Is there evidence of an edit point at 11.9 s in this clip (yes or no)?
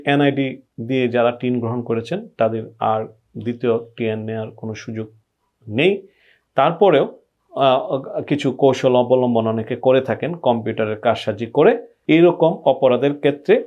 yes